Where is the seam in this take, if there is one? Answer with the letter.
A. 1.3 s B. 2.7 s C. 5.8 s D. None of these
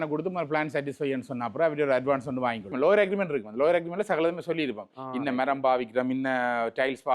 B